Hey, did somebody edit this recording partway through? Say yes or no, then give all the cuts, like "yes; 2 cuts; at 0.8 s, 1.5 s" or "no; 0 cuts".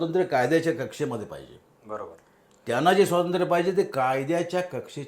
no; 0 cuts